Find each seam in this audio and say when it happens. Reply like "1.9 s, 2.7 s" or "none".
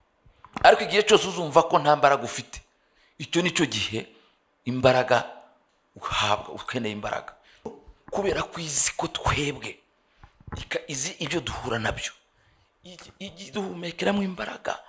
7.7 s